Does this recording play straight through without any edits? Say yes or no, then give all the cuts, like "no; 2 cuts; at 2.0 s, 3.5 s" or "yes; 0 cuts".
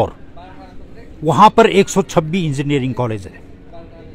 yes; 0 cuts